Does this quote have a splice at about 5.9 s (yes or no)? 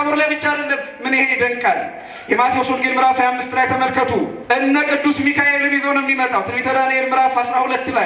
no